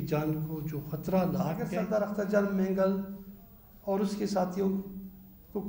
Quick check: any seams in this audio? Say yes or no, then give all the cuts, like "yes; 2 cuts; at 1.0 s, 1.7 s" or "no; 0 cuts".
yes; 1 cut; at 1.7 s